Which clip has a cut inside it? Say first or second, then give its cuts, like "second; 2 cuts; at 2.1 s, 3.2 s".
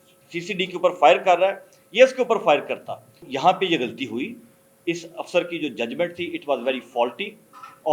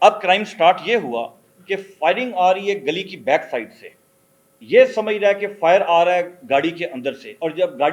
first; 1 cut; at 3.3 s